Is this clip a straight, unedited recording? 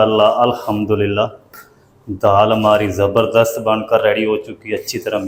yes; 0 cuts

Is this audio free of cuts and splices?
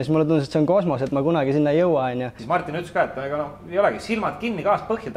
no; 1 cut; at 2.3 s

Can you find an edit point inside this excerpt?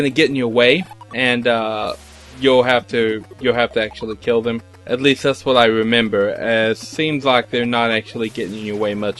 yes; 2 cuts; at 1.0 s, 4.7 s

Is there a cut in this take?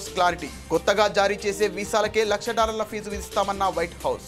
no; 0 cuts

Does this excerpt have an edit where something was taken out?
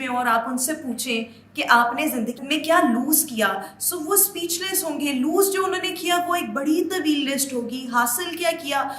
yes; 1 cut; at 2.4 s

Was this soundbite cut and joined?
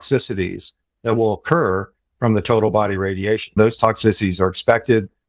yes; 1 cut; at 3.5 s

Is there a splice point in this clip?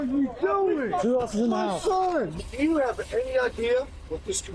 yes; 2 cuts; at 1.0 s, 2.4 s

